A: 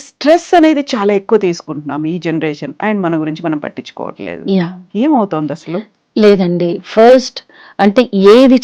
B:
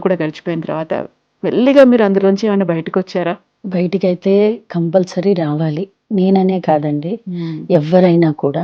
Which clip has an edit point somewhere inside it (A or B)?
B